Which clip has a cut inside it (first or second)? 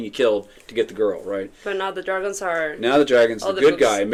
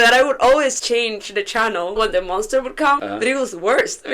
second